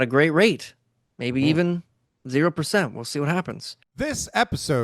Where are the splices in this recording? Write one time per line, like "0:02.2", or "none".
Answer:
0:03.8